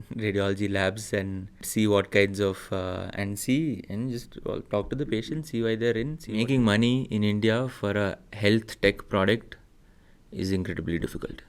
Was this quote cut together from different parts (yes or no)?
yes